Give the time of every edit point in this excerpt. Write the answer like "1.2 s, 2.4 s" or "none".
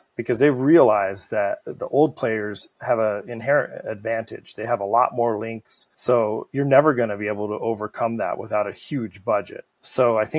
1.7 s